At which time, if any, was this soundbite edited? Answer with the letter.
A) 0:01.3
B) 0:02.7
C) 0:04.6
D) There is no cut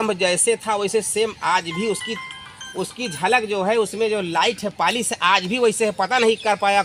D